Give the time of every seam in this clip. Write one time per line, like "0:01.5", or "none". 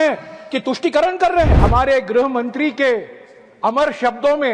0:01.5